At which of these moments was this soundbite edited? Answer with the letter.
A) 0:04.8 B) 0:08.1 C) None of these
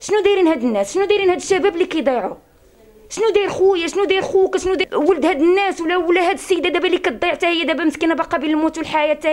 A